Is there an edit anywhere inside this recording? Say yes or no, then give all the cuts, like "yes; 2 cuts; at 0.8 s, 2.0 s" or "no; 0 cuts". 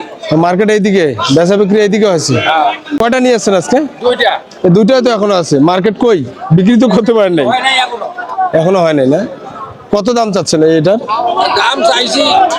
yes; 1 cut; at 3.0 s